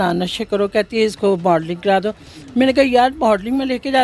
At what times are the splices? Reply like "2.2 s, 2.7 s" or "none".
none